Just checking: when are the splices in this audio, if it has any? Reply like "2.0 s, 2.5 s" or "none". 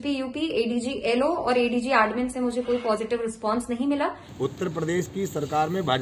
4.2 s